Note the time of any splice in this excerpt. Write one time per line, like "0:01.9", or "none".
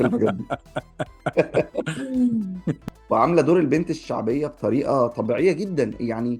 0:02.7